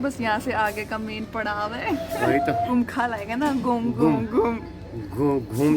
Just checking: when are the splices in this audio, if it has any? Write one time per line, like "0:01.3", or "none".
0:02.7